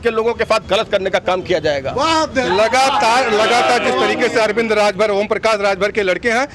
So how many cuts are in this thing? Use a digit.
0